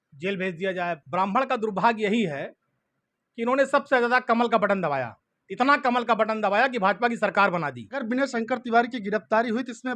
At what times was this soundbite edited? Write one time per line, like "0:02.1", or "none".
0:01.0
0:08.0